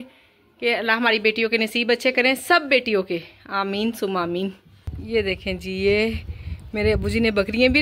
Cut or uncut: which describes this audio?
uncut